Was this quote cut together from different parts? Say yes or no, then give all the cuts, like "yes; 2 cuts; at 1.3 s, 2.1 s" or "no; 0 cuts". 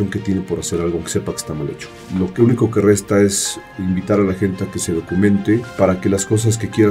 yes; 2 cuts; at 1.9 s, 5.7 s